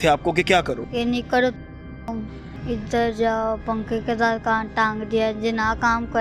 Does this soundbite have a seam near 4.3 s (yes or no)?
no